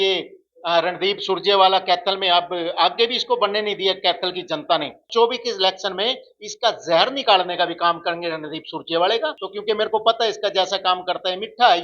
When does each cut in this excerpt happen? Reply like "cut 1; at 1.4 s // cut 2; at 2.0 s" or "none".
cut 1; at 5.0 s // cut 2; at 9.4 s